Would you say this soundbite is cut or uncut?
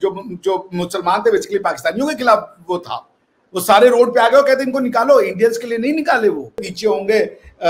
cut